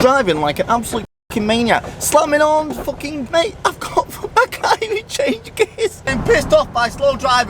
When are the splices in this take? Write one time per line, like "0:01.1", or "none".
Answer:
0:03.2
0:06.0